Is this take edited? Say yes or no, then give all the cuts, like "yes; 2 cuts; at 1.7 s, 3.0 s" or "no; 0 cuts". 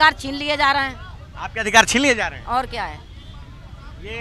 no; 0 cuts